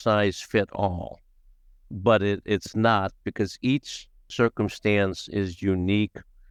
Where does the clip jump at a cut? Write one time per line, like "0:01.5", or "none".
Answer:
none